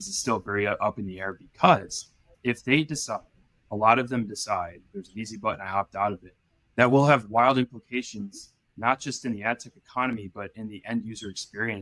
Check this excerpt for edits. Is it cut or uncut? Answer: cut